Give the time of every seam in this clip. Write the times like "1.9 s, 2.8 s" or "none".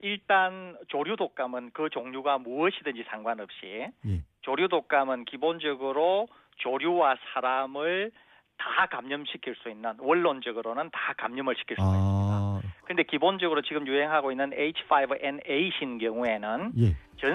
4.2 s